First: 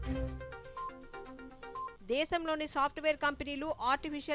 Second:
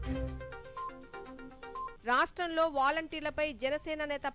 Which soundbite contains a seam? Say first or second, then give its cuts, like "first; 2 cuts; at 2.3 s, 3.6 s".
first; 1 cut; at 1.5 s